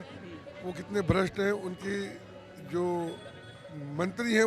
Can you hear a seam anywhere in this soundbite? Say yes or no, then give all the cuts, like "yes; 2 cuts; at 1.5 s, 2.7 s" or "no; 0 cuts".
no; 0 cuts